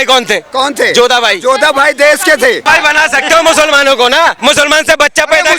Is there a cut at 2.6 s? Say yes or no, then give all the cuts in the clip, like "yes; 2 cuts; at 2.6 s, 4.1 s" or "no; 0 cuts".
yes; 2 cuts; at 2.6 s, 4.4 s